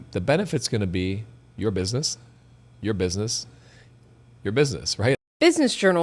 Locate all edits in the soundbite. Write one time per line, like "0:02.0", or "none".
0:05.2